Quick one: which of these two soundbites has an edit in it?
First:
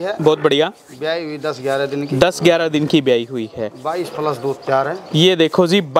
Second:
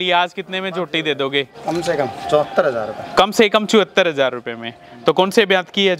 second; 1 cut; at 1.5 s

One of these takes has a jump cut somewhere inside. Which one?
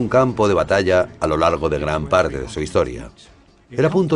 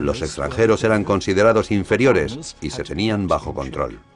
first; 1 cut; at 1.6 s

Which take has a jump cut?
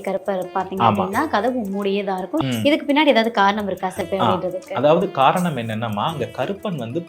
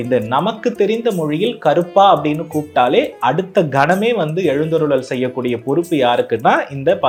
first; 2 cuts; at 2.4 s, 3.9 s

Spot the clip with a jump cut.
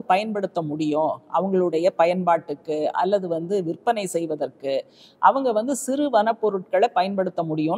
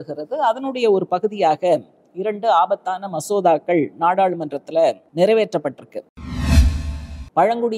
second; 2 cuts; at 5.0 s, 6.6 s

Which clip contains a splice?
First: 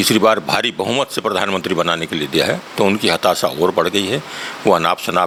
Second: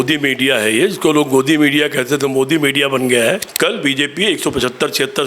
second; 1 cut; at 3.5 s

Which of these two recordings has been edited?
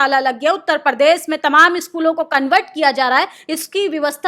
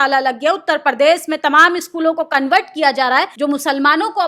second; 1 cut; at 3.3 s

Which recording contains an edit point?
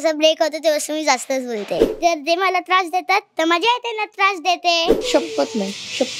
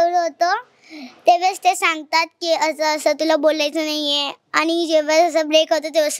first; 2 cuts; at 1.9 s, 5.0 s

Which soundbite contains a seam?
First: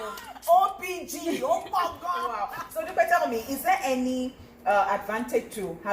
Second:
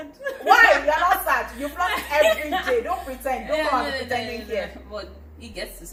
first; 1 cut; at 2.6 s

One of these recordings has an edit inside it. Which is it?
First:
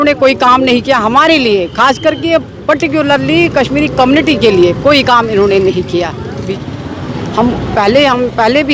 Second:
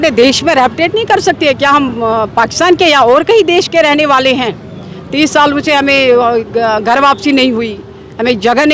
first; 1 cut; at 6.4 s

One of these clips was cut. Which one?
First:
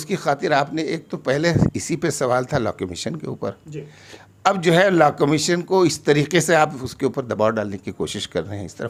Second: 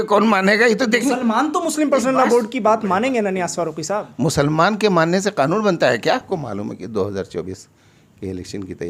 second; 1 cut; at 6.2 s

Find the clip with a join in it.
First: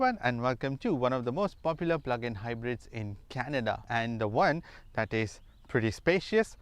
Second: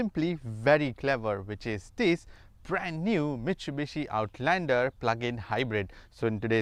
first; 1 cut; at 1.1 s

